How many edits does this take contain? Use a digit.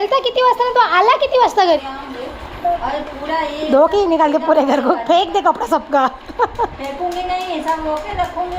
1